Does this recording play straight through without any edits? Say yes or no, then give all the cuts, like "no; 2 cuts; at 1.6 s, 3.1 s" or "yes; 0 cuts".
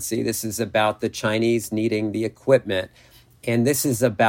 yes; 0 cuts